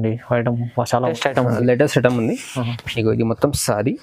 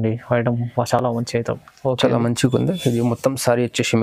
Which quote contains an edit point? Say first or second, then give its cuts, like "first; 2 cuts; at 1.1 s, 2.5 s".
first; 1 cut; at 1.1 s